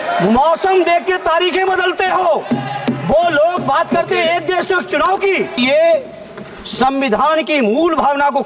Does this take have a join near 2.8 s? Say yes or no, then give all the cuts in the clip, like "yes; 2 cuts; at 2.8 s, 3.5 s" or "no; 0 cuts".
no; 1 cut; at 5.6 s